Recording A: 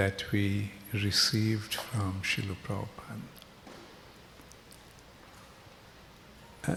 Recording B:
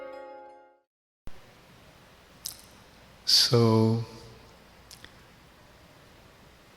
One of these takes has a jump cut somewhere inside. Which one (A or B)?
B